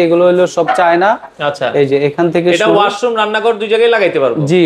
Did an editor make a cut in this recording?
no; 0 cuts

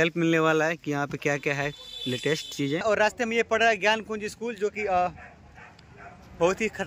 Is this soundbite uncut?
no; 1 cut; at 2.8 s

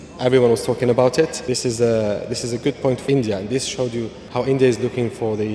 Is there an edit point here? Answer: yes; 3 cuts; at 1.4 s, 3.0 s, 4.2 s

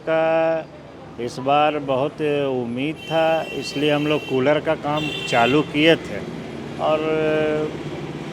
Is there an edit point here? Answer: no; 0 cuts

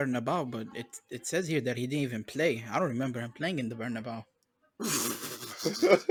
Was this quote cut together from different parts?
no; 0 cuts

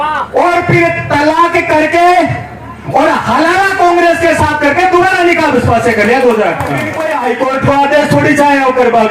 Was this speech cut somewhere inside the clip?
yes; 1 cut; at 6.9 s

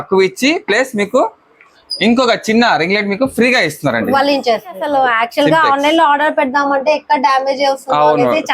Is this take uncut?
no; 1 cut; at 4.8 s

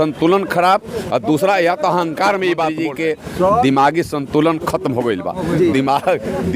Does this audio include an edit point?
yes; 1 cut; at 2.9 s

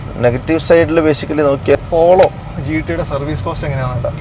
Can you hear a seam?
yes; 1 cut; at 1.8 s

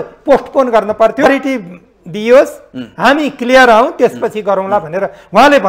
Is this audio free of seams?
no; 1 cut; at 1.3 s

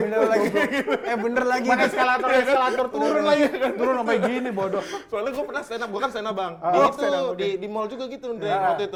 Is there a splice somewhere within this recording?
no; 0 cuts

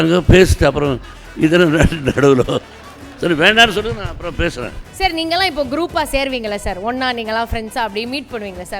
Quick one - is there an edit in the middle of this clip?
yes; 1 cut; at 4.8 s

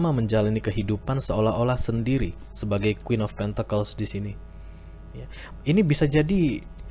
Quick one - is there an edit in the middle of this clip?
no; 0 cuts

